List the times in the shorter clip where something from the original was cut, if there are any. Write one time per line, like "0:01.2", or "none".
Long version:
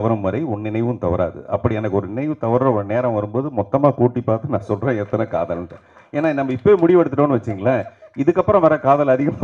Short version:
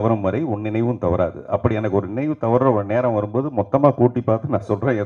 none